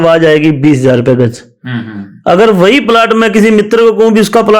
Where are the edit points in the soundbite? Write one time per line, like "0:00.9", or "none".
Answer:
none